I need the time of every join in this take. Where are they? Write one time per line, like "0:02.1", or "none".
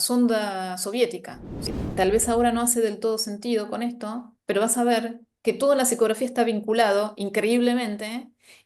0:01.7